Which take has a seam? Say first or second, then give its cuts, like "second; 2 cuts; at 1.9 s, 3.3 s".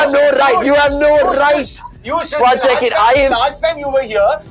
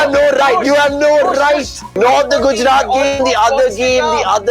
second; 1 cut; at 1.8 s